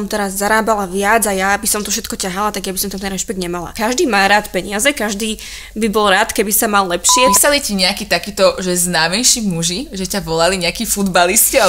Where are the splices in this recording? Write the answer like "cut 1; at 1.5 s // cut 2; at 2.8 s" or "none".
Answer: cut 1; at 3.7 s // cut 2; at 7.3 s

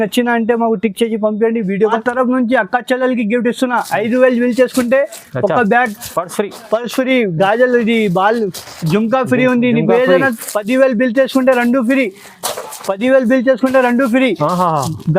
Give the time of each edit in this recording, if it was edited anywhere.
cut 1; at 2.0 s

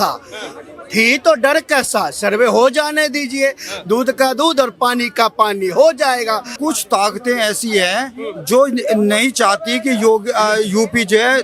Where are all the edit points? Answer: cut 1; at 6.5 s

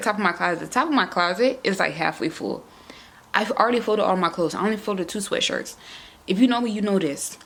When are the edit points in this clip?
none

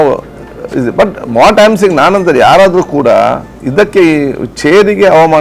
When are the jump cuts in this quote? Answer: cut 1; at 3.5 s

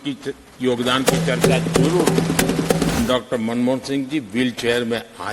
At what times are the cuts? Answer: cut 1; at 3.0 s

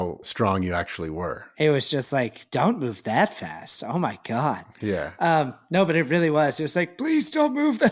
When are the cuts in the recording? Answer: none

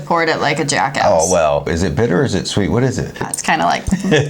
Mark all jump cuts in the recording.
cut 1; at 1.7 s // cut 2; at 3.3 s

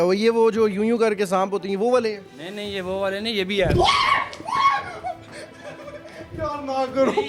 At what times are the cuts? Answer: none

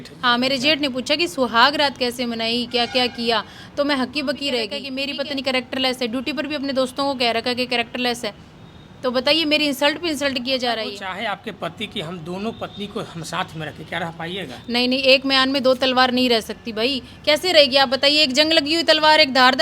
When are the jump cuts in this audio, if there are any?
cut 1; at 4.8 s // cut 2; at 11.1 s

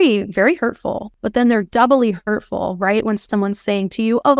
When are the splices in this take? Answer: cut 1; at 1.1 s

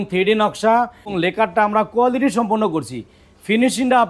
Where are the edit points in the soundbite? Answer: cut 1; at 1.1 s

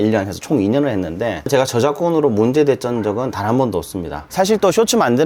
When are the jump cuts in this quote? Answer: cut 1; at 1.5 s // cut 2; at 4.3 s

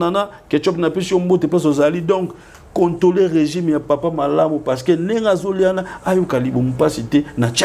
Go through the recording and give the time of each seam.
none

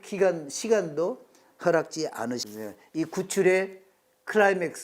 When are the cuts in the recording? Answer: cut 1; at 2.5 s

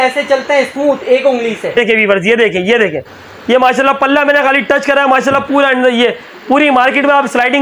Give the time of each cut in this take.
cut 1; at 1.8 s

